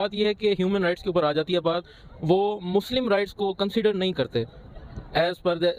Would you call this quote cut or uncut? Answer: uncut